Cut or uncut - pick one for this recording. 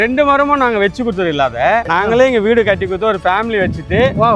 cut